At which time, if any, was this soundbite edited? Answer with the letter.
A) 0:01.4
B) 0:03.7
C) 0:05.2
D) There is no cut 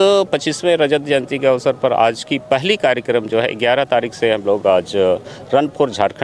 D